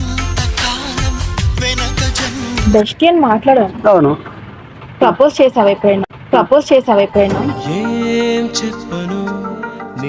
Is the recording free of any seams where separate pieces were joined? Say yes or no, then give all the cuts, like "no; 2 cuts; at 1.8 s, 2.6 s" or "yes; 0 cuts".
yes; 0 cuts